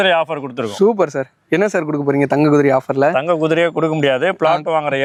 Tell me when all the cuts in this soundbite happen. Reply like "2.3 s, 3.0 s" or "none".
none